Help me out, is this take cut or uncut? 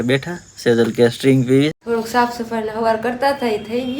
cut